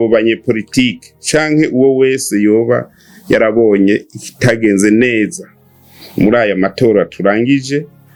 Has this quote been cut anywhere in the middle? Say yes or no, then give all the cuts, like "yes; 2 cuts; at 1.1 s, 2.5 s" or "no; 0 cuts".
no; 0 cuts